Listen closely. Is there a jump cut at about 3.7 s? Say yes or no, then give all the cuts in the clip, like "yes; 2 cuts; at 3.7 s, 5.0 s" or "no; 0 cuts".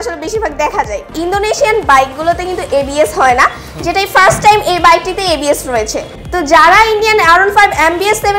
no; 2 cuts; at 1.1 s, 6.2 s